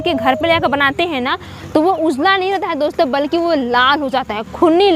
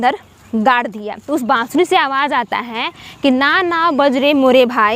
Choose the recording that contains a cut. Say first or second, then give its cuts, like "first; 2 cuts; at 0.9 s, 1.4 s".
second; 1 cut; at 1.2 s